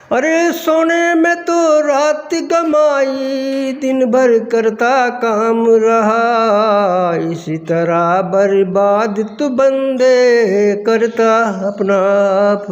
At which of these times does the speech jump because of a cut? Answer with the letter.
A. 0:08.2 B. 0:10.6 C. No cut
C